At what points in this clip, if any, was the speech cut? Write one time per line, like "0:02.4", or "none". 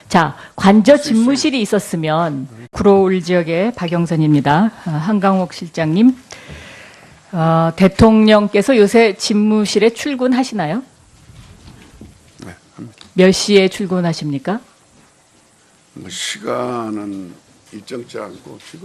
none